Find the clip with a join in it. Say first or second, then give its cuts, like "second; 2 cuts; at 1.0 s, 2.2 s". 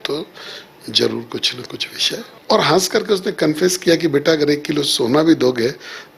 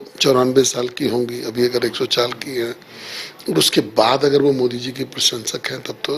first; 1 cut; at 2.3 s